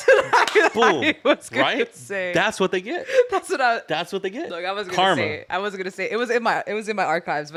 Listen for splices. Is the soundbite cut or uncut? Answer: uncut